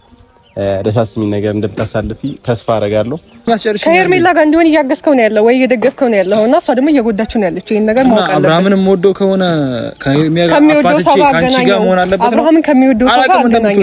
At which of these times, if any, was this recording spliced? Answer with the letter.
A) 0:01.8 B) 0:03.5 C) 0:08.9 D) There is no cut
B